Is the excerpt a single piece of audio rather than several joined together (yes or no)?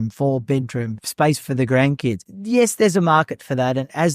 no